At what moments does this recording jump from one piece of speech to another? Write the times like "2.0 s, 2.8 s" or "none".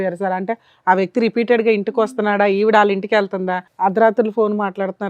3.6 s